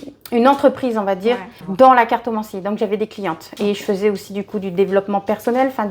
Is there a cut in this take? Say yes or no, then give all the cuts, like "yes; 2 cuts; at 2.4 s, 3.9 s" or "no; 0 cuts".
no; 0 cuts